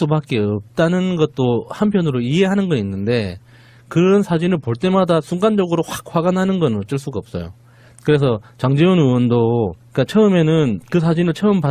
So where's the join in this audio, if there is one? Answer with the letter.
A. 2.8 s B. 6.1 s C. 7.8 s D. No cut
A